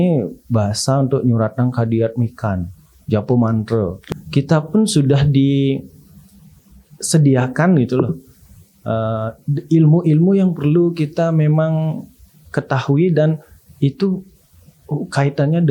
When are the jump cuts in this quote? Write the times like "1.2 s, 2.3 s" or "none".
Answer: 4.0 s